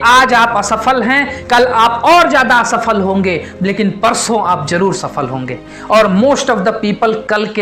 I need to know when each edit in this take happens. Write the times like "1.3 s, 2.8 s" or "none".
none